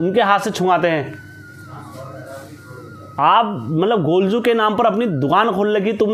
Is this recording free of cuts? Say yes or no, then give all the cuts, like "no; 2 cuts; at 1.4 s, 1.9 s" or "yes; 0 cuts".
yes; 0 cuts